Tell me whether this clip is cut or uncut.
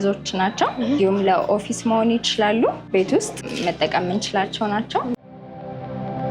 cut